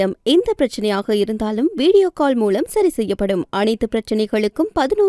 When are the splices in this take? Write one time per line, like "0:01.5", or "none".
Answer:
none